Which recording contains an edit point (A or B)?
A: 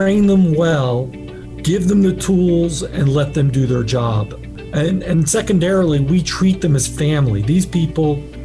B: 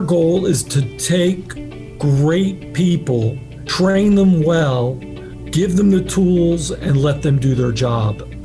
B